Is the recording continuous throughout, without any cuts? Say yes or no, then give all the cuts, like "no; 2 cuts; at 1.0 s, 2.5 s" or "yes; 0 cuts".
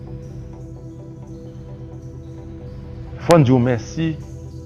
yes; 0 cuts